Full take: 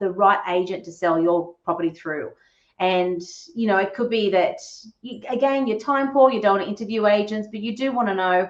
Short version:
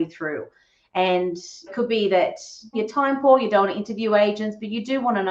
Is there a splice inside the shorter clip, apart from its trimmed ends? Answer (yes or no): yes